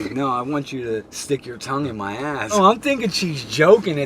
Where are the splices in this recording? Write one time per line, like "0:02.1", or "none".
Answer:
0:01.1
0:02.5